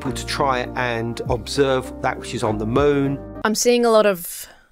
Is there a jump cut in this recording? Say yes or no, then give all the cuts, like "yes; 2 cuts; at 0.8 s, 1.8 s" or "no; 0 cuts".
yes; 1 cut; at 3.2 s